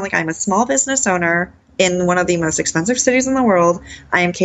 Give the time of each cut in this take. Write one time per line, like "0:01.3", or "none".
0:01.6